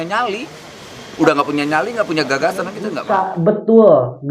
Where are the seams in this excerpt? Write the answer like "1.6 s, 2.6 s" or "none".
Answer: 3.0 s

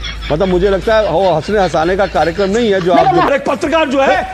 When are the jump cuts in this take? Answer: 3.3 s

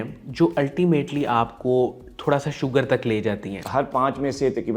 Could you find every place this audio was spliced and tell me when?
3.6 s

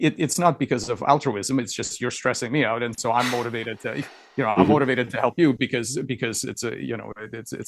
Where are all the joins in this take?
none

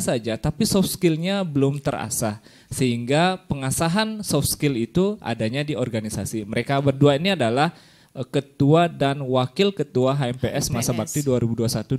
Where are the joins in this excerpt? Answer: none

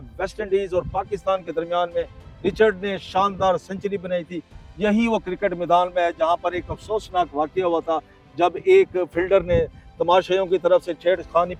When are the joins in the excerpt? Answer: none

